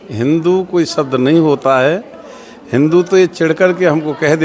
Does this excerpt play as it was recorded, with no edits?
yes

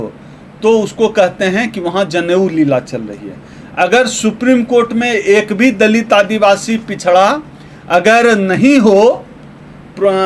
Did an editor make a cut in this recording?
no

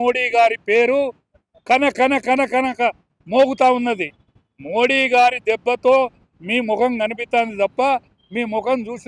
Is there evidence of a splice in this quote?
no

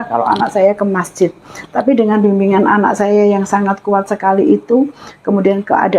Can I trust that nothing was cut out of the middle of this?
yes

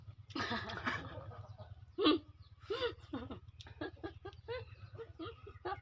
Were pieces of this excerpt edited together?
no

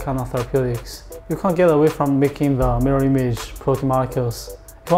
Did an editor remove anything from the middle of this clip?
yes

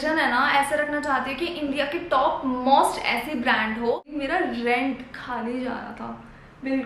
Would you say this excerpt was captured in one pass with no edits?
no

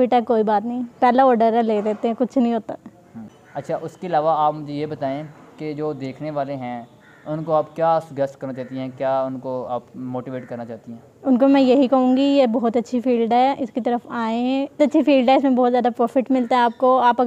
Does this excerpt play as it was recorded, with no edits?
yes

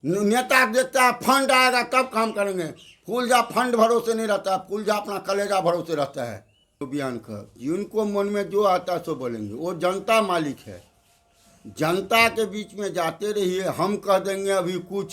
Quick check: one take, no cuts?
no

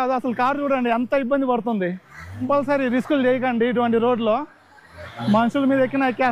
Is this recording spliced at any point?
yes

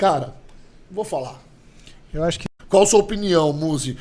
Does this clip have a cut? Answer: yes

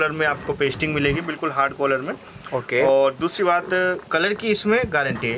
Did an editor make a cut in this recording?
no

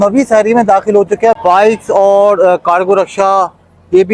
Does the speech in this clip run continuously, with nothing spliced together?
no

